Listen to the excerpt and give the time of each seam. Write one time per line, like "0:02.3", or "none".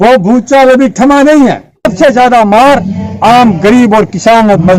0:01.9